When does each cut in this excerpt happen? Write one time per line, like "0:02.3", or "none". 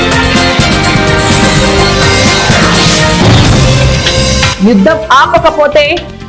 0:04.5